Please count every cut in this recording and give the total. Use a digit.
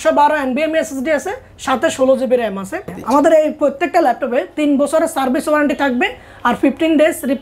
1